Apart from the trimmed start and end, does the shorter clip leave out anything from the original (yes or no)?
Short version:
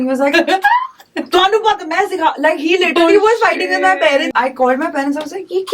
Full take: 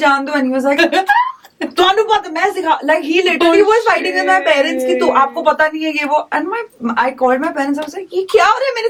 yes